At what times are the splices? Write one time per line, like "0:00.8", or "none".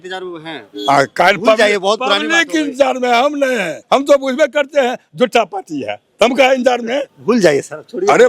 0:03.7
0:07.1

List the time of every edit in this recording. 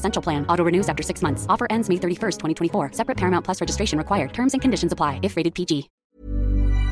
0:05.9

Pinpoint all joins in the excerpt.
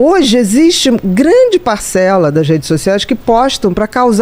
none

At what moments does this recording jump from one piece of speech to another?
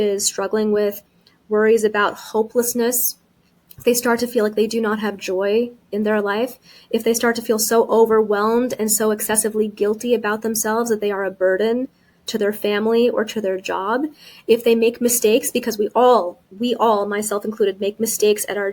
none

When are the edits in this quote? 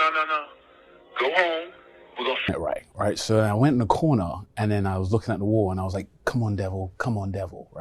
0:02.5

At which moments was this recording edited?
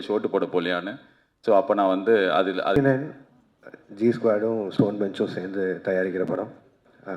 0:02.8

